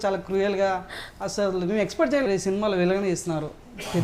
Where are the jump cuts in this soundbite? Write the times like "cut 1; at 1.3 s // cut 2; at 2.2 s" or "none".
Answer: cut 1; at 2.3 s